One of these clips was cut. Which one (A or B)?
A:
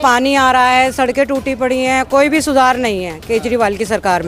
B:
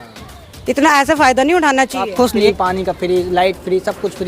B